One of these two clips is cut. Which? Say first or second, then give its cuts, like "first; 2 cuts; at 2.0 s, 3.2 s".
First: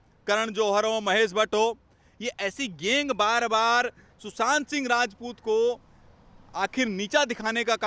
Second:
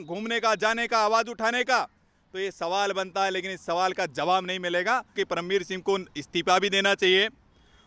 second; 1 cut; at 5.1 s